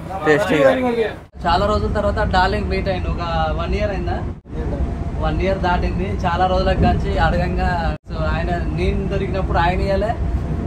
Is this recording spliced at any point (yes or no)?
yes